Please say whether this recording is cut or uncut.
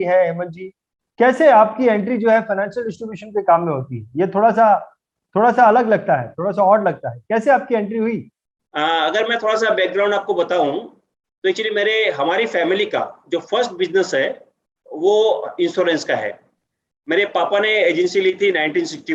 uncut